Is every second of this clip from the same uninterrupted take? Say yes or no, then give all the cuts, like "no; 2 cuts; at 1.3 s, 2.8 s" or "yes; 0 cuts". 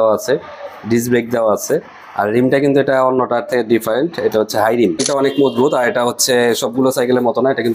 no; 1 cut; at 5.0 s